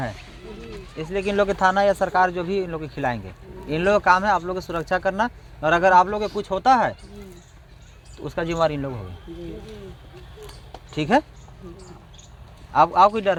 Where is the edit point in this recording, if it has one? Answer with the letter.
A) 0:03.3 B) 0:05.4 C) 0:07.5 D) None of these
D